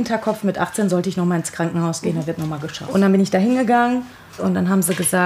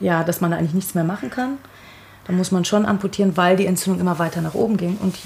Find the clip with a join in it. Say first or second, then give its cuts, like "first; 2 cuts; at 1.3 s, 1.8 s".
first; 1 cut; at 2.7 s